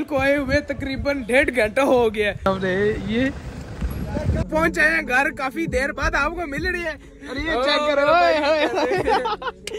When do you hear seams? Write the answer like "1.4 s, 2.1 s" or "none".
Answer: 2.4 s, 4.4 s